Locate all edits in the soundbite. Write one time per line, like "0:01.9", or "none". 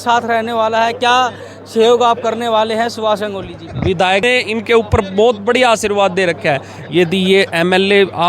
0:04.2